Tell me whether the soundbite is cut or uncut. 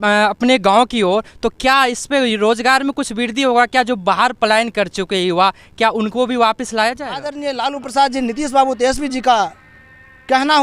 cut